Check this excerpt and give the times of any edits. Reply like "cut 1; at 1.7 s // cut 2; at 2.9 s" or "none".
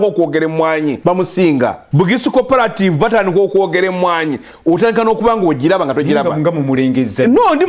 cut 1; at 1.0 s // cut 2; at 1.8 s